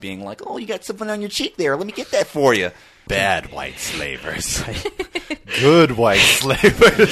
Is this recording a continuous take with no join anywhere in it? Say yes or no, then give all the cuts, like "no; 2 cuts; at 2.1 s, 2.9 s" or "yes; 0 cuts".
no; 1 cut; at 3.0 s